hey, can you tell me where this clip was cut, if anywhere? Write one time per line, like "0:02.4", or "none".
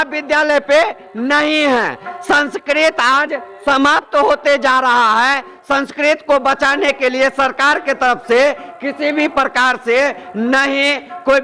none